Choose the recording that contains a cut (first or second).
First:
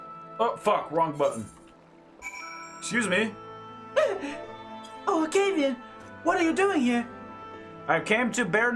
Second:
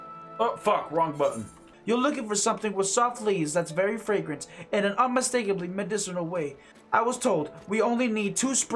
second